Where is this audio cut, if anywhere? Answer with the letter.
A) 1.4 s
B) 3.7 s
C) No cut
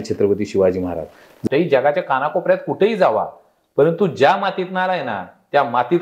A